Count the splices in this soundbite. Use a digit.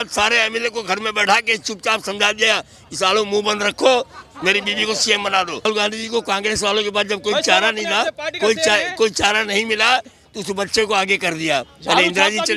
1